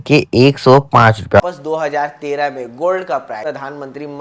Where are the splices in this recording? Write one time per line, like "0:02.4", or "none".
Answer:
0:01.4
0:03.4